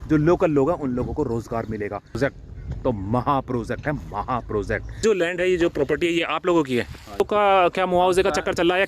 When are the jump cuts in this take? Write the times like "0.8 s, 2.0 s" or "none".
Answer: 2.2 s, 5.0 s, 7.2 s